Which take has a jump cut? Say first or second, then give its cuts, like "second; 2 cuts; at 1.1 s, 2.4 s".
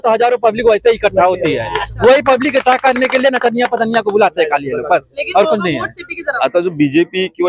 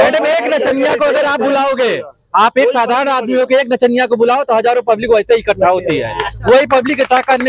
first; 1 cut; at 6.3 s